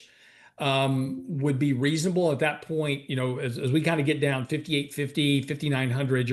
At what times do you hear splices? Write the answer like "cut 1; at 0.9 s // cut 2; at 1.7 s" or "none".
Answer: none